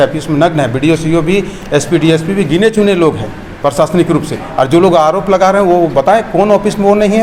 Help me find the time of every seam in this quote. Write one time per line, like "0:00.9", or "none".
none